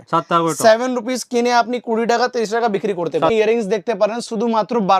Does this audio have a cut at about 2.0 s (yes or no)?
no